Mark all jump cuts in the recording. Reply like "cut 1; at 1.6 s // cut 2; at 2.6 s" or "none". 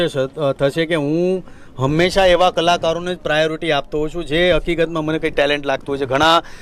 none